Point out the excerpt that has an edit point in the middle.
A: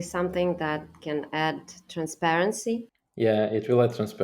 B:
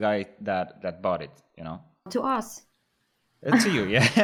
A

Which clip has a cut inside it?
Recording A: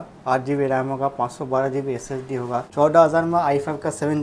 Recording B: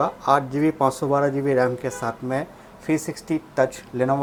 A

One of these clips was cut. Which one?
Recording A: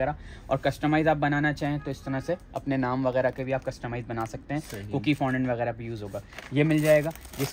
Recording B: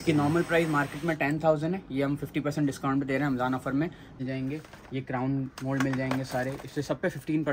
B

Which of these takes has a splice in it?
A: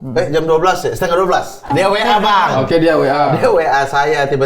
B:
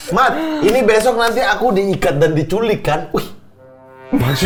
A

